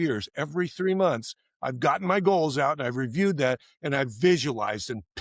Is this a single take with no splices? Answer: yes; 0 cuts

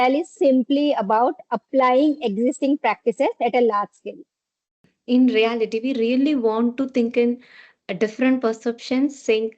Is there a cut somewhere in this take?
yes; 1 cut; at 4.7 s

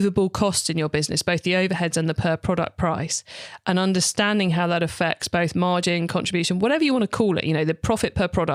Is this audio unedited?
yes; 0 cuts

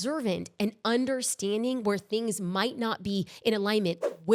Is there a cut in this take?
no; 0 cuts

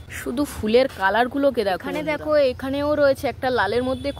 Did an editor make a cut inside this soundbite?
yes; 1 cut; at 1.9 s

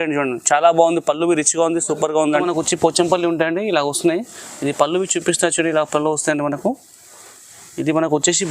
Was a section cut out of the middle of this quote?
yes; 1 cut; at 2.4 s

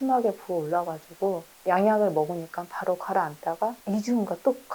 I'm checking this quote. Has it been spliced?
yes; 2 cuts; at 1.5 s, 3.8 s

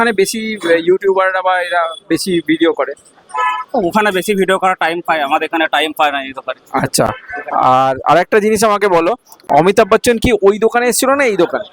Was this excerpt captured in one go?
yes; 0 cuts

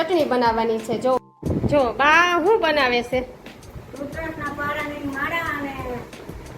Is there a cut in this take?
yes; 1 cut; at 1.2 s

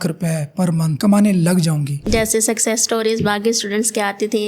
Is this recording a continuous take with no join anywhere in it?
no; 2 cuts; at 0.9 s, 1.9 s

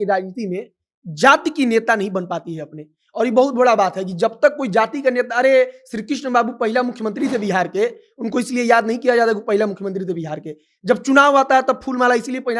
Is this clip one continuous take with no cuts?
yes; 0 cuts

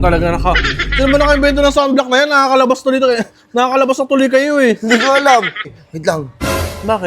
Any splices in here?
yes; 1 cut; at 5.7 s

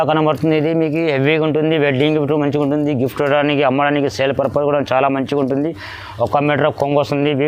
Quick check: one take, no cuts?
yes; 0 cuts

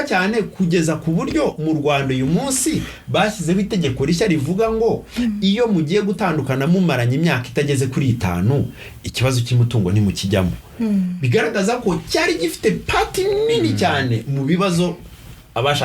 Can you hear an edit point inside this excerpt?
no; 0 cuts

